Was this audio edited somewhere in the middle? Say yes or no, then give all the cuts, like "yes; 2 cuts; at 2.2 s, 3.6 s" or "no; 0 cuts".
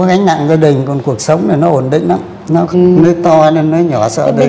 yes; 1 cut; at 2.7 s